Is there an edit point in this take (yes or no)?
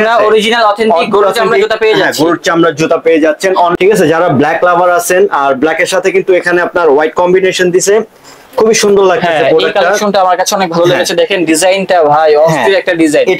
yes